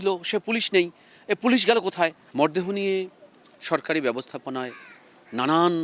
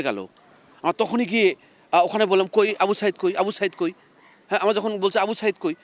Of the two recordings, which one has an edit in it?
first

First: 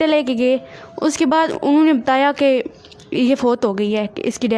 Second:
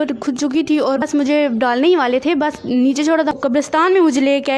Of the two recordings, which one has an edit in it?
second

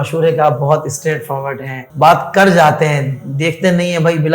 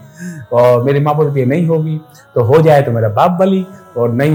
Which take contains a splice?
first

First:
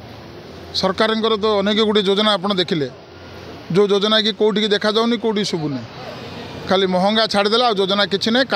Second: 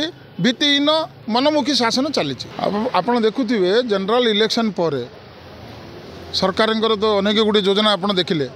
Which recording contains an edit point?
second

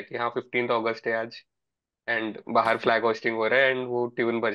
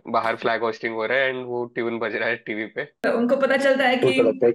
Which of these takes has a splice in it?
second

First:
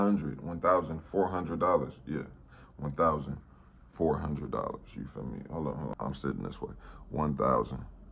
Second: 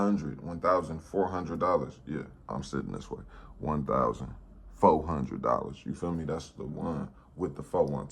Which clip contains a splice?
second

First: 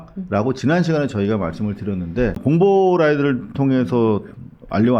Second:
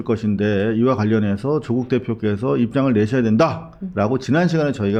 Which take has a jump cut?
first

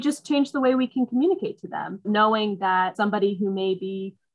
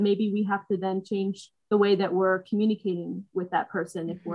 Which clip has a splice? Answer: first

